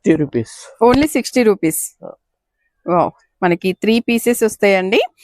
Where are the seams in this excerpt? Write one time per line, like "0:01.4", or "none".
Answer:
none